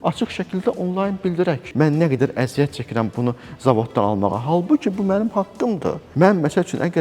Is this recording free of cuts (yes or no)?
no